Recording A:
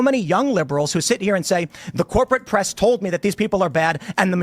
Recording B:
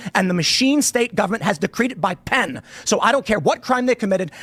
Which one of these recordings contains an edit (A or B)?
A